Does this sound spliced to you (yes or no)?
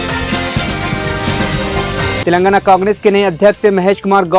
yes